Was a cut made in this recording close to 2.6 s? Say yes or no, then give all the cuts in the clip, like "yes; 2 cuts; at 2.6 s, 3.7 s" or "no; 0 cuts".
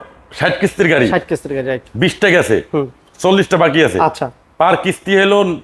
no; 0 cuts